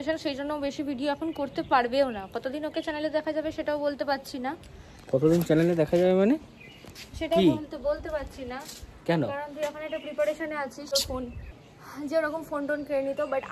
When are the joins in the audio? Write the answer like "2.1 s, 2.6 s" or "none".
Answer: 10.9 s

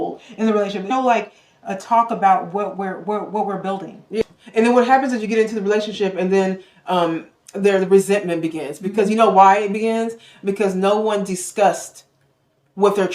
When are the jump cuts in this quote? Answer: 0.9 s, 4.2 s

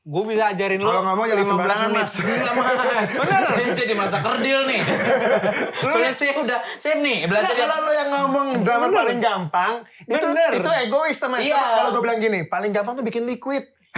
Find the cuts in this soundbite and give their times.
none

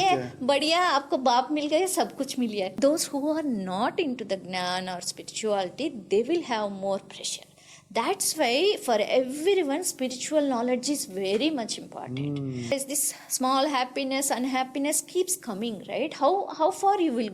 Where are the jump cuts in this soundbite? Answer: 2.7 s, 12.7 s

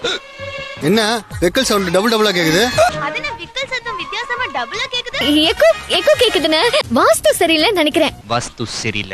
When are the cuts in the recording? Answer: 2.9 s, 5.2 s, 8.2 s

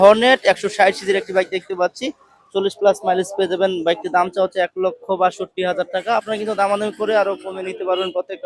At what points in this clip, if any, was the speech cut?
none

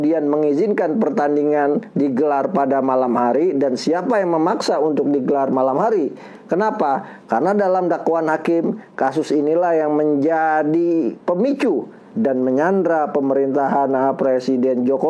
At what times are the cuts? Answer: 12.1 s

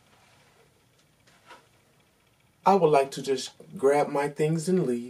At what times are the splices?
2.6 s

